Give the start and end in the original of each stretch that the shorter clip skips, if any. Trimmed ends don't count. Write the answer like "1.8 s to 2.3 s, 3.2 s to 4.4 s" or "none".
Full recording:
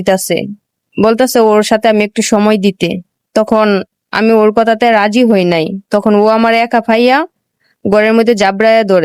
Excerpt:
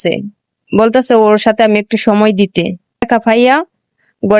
3.3 s to 6.7 s